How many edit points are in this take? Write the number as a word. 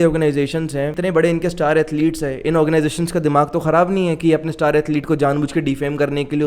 one